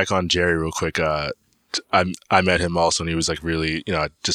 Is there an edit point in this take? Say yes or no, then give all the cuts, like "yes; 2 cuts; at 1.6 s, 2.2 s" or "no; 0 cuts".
no; 0 cuts